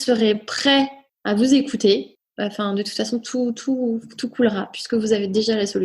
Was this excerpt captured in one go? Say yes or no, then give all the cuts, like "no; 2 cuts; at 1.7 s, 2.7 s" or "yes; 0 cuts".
no; 2 cuts; at 1.1 s, 2.2 s